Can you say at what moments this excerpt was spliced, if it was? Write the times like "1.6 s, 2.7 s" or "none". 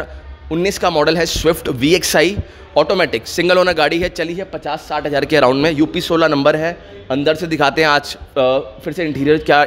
none